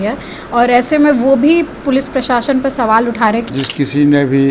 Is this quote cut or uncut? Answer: cut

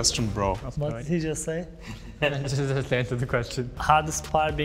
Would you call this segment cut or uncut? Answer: uncut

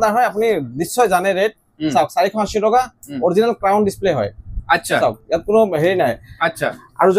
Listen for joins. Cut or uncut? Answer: uncut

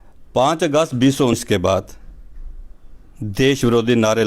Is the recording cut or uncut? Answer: cut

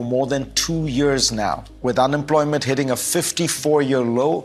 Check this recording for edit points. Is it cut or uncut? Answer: uncut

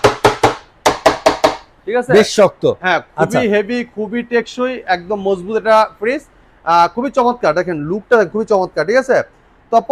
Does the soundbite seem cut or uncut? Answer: uncut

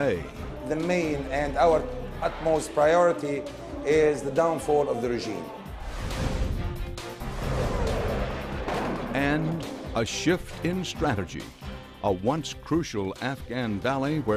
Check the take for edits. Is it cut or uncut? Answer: uncut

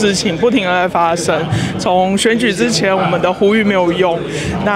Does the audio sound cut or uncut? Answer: uncut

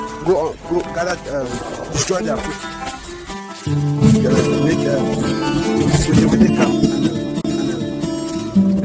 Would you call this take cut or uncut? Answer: uncut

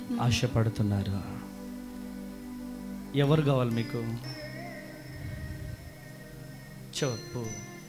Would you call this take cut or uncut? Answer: uncut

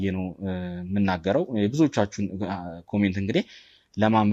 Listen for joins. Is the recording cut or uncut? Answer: uncut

